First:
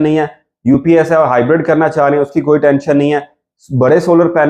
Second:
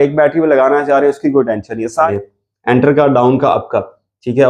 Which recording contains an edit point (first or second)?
second